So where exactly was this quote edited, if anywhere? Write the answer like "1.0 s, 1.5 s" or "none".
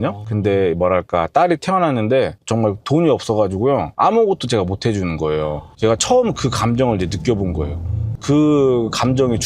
8.1 s